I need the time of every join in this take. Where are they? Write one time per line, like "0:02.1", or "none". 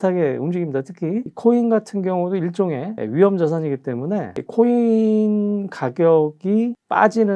none

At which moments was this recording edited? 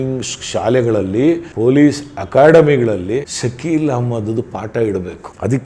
0:01.5
0:03.3

